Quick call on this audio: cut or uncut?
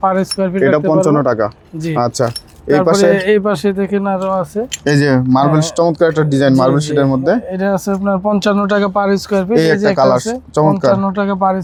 uncut